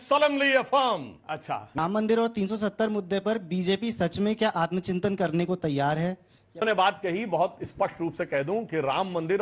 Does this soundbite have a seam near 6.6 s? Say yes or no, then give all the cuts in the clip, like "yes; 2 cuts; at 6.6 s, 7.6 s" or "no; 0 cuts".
yes; 2 cuts; at 1.8 s, 6.6 s